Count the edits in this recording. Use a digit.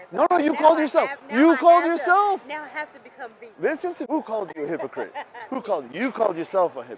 1